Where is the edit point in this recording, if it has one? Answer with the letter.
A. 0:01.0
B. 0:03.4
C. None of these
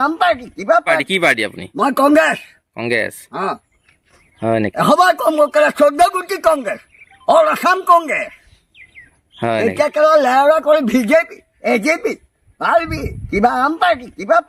A